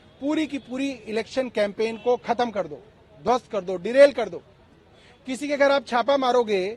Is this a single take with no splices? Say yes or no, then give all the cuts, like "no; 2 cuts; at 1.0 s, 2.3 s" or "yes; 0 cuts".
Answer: yes; 0 cuts